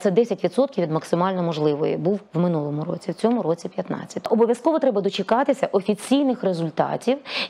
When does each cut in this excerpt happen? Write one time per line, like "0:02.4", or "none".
0:04.3